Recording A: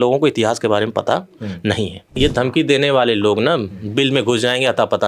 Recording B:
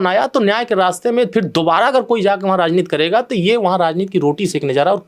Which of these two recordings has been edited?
A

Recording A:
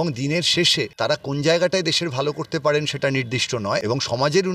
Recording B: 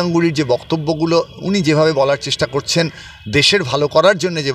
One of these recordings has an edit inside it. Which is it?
A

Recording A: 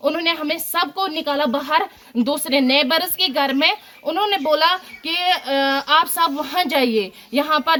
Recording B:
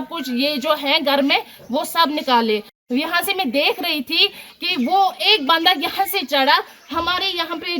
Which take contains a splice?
B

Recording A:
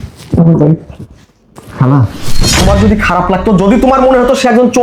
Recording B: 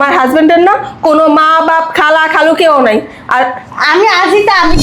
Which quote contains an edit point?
A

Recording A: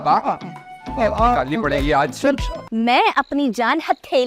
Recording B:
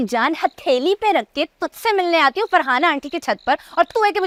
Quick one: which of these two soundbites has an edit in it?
A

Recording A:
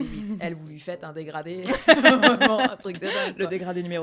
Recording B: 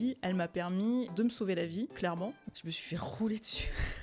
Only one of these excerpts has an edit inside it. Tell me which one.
B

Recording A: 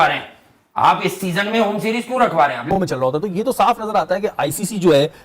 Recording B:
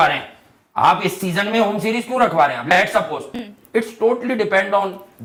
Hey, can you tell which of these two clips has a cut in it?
A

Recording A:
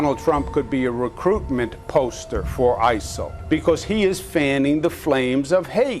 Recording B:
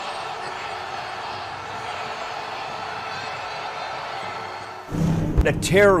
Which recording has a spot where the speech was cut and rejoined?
A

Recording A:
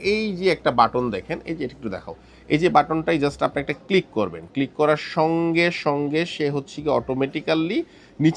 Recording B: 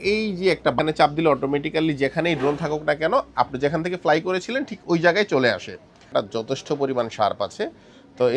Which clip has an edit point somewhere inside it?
B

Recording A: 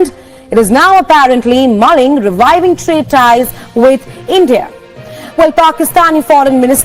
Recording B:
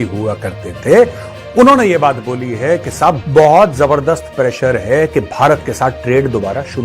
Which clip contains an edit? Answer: B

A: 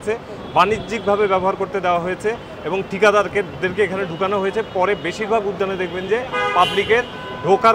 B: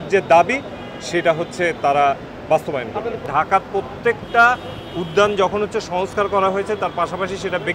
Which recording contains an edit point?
B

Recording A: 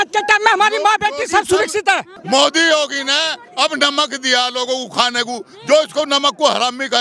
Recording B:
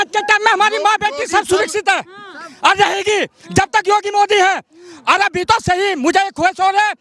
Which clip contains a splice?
A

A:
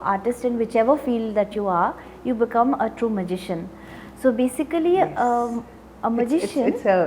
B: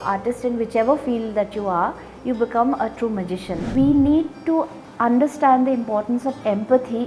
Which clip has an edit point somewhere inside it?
B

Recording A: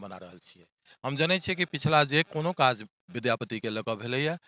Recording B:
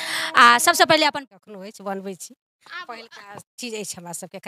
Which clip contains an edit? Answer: B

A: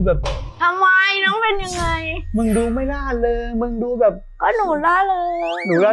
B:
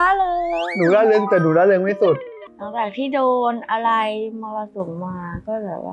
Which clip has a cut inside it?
B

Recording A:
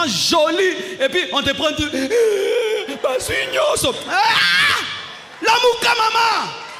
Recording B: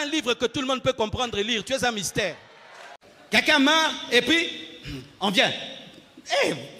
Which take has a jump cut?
B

